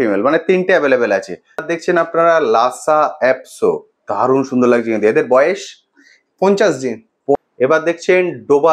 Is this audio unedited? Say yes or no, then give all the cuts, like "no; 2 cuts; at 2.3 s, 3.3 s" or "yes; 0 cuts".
no; 2 cuts; at 1.7 s, 7.3 s